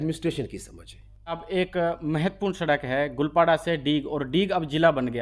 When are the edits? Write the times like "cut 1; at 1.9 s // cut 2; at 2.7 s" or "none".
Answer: cut 1; at 1.4 s